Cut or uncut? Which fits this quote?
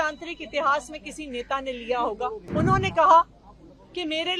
cut